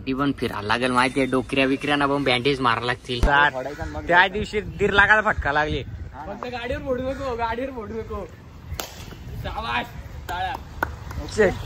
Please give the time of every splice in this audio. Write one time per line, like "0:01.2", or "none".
0:03.2